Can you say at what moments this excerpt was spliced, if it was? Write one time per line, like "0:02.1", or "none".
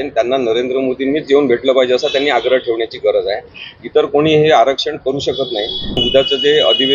0:06.0

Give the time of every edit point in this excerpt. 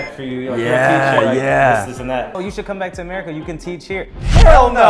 0:02.4

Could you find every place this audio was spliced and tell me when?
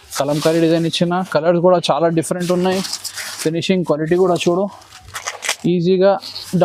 none

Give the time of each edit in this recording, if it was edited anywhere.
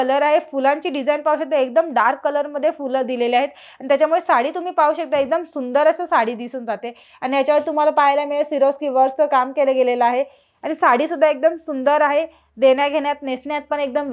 none

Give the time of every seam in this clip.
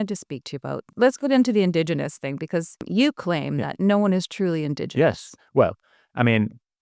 0:00.9
0:02.8

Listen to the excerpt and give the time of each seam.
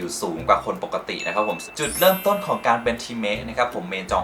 0:01.6

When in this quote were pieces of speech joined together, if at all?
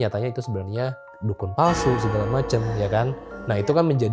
0:01.1

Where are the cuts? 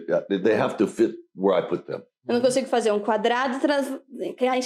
none

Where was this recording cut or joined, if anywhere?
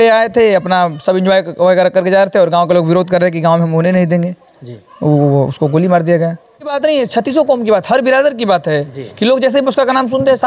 0:06.7

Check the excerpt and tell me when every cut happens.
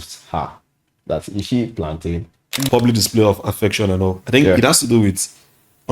0:02.6

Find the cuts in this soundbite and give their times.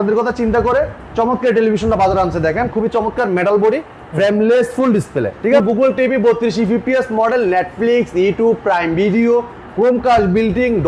0:05.6

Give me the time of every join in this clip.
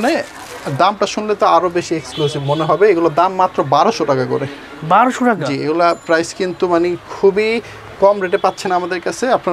none

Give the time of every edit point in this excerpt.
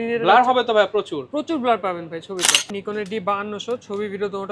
0:02.7

